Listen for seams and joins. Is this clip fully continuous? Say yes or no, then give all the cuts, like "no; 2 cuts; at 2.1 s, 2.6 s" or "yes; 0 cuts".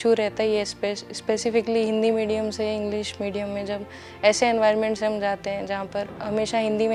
yes; 0 cuts